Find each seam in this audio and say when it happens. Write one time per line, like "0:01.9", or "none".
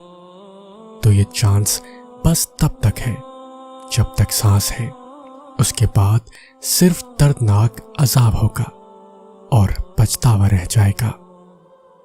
0:11.2